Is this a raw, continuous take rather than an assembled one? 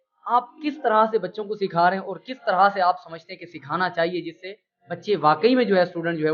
yes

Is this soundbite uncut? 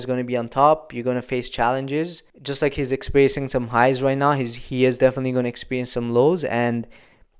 yes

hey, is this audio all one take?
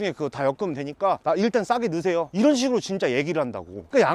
yes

